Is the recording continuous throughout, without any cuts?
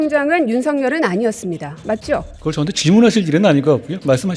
no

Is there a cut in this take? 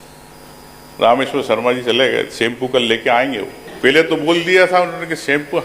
yes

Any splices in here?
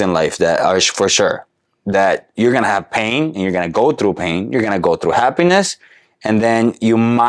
no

